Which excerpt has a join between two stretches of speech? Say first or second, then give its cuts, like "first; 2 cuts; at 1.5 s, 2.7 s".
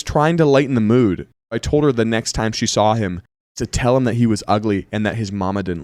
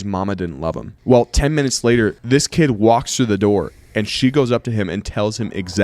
second; 1 cut; at 2.2 s